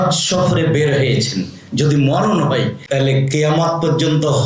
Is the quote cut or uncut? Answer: cut